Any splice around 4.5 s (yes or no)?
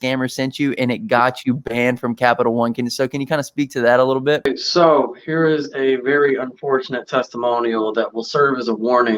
yes